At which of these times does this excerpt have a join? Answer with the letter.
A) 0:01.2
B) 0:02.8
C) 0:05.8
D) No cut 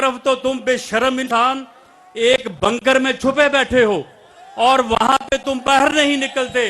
A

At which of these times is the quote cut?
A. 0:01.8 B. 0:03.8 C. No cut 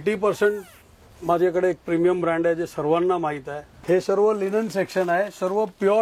B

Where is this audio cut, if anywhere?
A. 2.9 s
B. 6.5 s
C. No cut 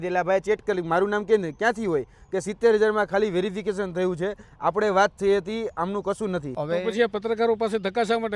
B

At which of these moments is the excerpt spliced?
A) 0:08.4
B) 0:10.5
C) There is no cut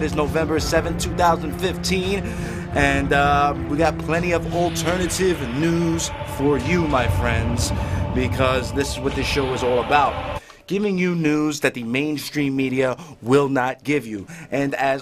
A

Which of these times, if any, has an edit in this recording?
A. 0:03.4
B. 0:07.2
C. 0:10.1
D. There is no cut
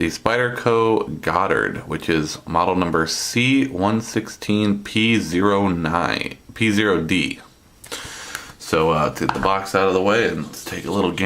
D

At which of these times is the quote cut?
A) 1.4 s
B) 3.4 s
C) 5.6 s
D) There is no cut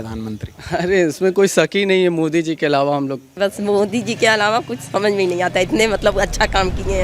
B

